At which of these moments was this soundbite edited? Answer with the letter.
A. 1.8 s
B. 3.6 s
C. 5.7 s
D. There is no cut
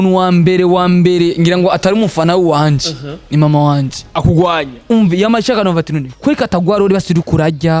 D